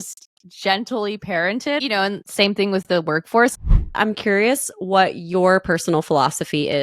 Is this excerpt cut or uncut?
cut